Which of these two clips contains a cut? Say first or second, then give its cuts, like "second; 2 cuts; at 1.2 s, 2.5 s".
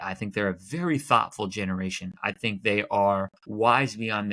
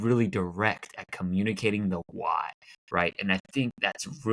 first; 1 cut; at 3.4 s